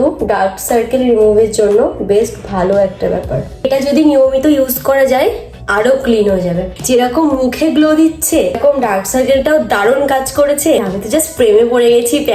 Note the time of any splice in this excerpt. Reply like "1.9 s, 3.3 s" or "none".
3.6 s, 6.7 s, 10.8 s